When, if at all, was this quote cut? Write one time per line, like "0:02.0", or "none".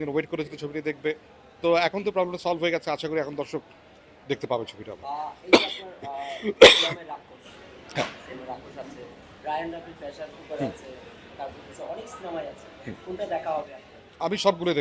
none